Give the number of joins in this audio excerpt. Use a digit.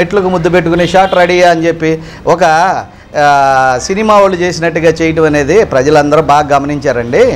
0